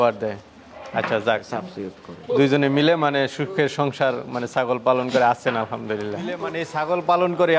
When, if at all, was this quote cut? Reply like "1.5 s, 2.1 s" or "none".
6.6 s